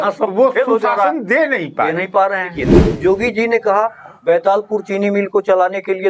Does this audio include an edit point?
yes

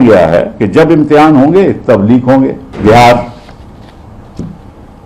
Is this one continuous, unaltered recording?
no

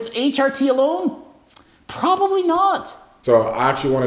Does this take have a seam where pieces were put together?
yes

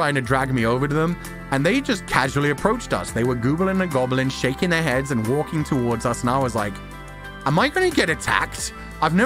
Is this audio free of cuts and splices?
yes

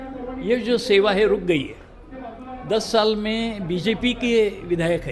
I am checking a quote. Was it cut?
no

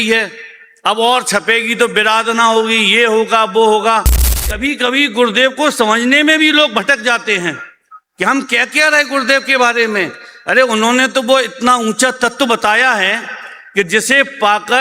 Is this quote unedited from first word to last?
no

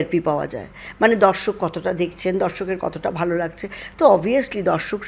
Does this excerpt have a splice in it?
no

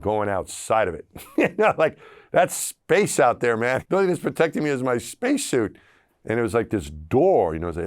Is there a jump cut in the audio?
yes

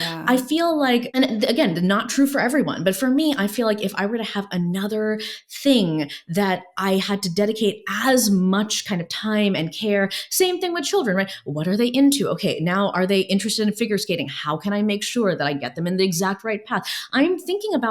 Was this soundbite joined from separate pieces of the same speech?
yes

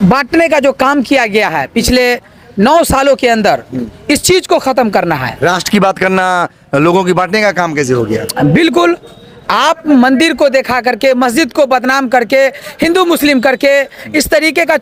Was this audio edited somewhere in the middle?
no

